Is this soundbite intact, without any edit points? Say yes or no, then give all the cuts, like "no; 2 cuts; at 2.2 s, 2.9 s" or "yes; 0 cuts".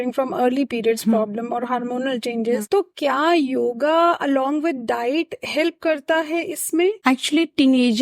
yes; 0 cuts